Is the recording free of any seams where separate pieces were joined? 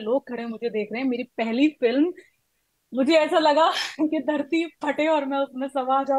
yes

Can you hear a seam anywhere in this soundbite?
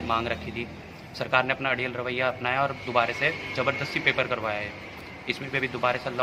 no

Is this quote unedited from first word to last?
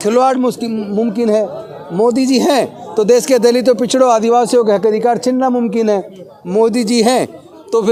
yes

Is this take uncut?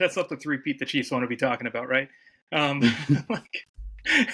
yes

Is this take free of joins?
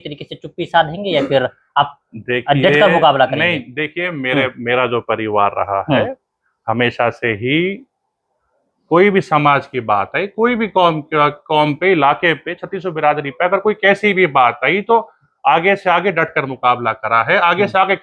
yes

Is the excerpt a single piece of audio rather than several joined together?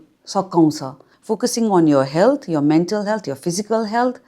no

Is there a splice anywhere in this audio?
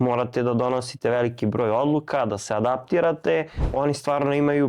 yes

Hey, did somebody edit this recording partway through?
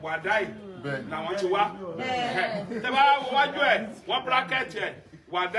no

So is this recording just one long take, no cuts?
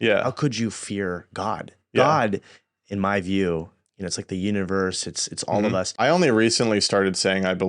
no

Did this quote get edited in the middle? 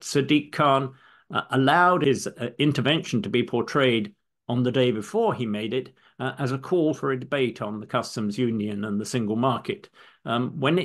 yes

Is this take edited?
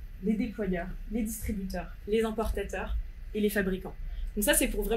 no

